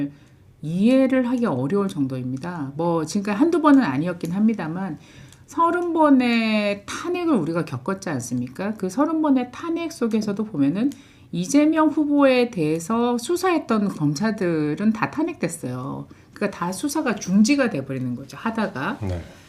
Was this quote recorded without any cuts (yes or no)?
yes